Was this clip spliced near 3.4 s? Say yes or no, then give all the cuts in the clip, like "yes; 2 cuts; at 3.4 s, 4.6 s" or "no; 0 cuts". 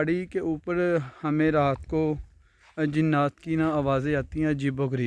no; 0 cuts